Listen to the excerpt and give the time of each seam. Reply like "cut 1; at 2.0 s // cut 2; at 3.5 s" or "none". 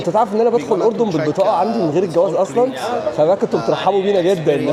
none